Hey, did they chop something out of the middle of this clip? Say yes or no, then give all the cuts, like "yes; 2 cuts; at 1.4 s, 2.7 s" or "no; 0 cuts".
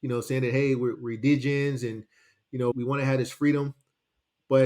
yes; 2 cuts; at 1.0 s, 2.7 s